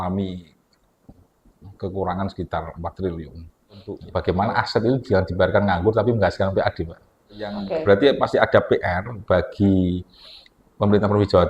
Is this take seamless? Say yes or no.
no